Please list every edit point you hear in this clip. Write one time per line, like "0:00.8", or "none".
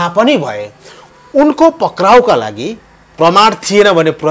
none